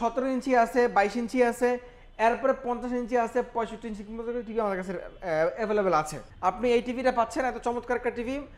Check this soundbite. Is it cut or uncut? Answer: cut